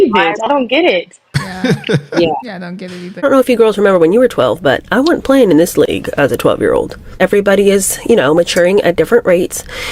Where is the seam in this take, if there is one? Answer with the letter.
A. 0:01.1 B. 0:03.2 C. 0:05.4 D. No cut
B